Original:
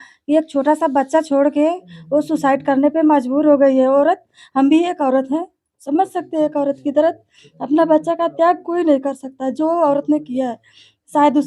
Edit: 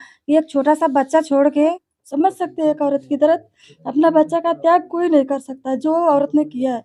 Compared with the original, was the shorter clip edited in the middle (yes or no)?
yes